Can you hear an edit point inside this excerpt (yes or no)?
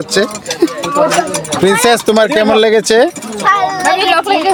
no